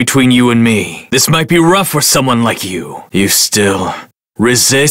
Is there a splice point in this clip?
no; 0 cuts

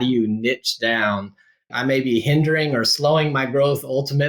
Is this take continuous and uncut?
no; 1 cut; at 1.7 s

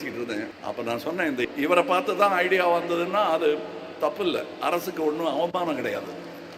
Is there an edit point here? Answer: yes; 1 cut; at 1.4 s

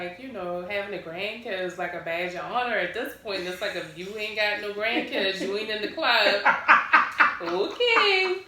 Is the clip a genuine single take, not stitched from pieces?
yes; 0 cuts

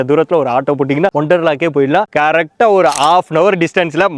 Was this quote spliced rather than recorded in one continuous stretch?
yes; 1 cut; at 2.1 s

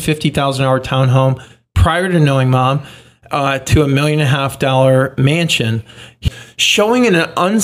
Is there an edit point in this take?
yes; 1 cut; at 6.2 s

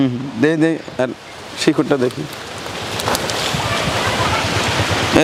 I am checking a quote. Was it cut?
no; 0 cuts

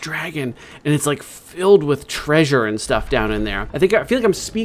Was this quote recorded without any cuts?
no; 1 cut; at 3.6 s

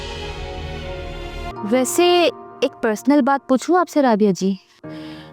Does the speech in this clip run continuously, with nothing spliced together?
no; 1 cut; at 1.5 s

